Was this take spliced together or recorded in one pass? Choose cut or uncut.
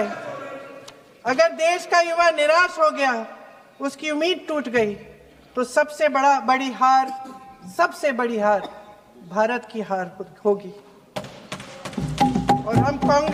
uncut